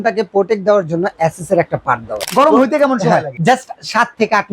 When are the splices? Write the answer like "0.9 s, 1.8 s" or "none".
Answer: 2.2 s, 3.3 s

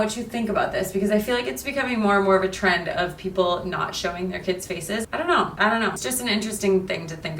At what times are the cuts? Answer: 5.0 s, 6.0 s

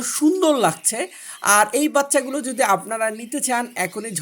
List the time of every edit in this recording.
none

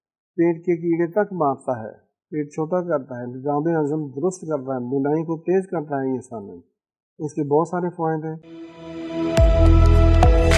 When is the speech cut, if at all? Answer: 8.4 s

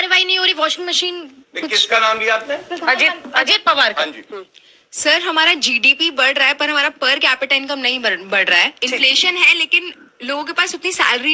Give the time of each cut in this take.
none

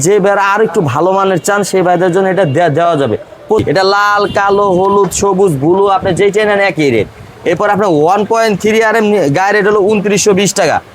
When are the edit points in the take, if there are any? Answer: 3.6 s

